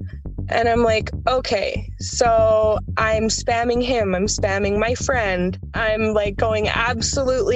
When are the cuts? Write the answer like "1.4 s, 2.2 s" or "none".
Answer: 5.7 s